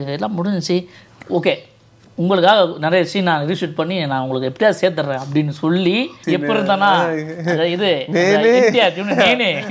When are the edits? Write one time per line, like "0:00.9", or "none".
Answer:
0:06.2